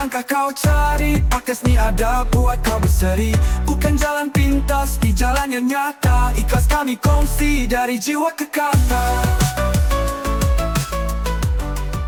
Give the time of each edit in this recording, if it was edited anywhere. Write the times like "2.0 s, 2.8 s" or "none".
none